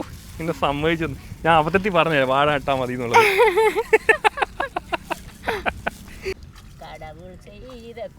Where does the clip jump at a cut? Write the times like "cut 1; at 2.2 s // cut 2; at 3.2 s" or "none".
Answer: cut 1; at 6.3 s